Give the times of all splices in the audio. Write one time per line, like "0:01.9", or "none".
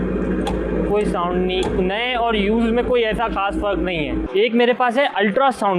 0:04.2